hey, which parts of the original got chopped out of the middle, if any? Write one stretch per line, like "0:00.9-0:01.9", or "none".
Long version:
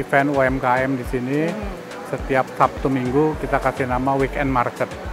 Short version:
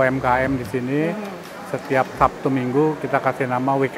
none